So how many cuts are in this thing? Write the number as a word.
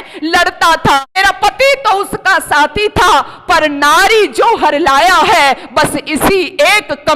one